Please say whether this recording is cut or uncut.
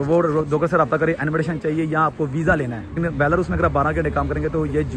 cut